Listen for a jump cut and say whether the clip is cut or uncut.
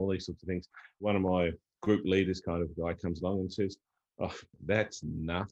cut